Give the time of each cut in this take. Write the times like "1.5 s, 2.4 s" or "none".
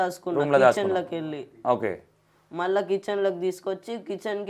none